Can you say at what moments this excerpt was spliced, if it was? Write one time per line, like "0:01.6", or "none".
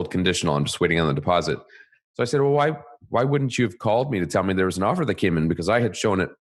none